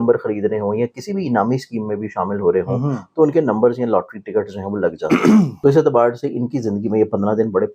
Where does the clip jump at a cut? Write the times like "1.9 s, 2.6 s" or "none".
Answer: 5.5 s